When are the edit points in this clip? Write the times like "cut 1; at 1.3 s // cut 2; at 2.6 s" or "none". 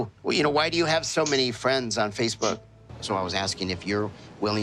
cut 1; at 2.7 s